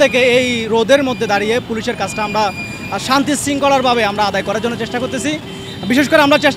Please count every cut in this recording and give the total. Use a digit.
0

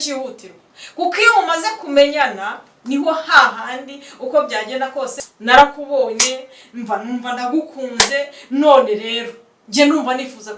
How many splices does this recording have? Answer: 1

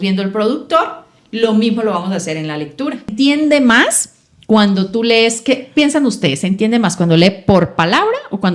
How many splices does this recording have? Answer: 1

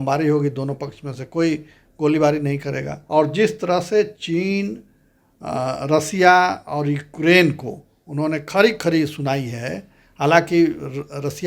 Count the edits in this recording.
1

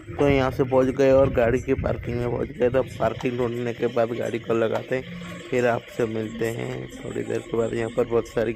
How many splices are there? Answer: 0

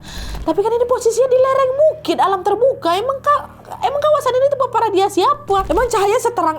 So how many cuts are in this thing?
1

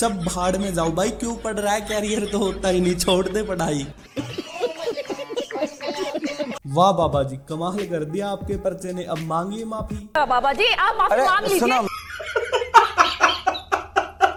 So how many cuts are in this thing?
0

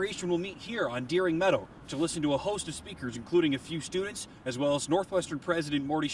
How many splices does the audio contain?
0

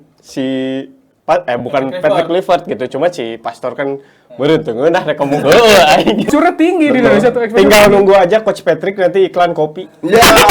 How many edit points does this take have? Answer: 1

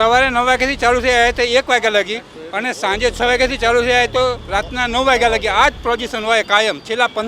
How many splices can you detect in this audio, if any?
0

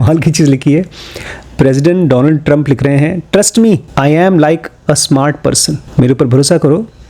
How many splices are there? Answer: 2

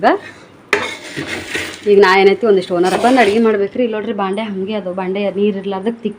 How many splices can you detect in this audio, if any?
1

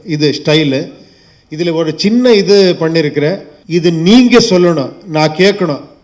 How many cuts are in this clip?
1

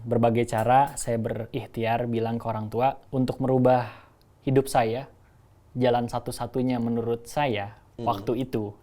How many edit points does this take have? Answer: 1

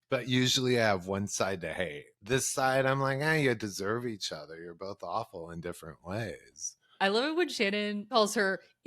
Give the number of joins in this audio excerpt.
3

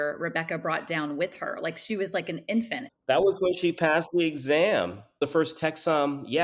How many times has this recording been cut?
1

